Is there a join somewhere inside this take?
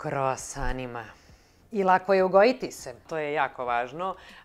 yes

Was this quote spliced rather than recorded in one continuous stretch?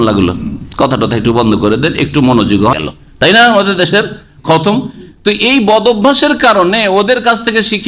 yes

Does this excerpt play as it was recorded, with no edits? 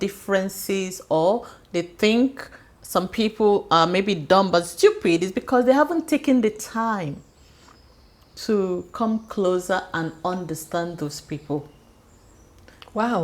yes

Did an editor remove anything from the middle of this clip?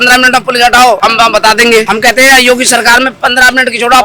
yes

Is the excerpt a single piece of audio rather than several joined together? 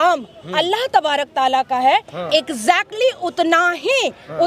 yes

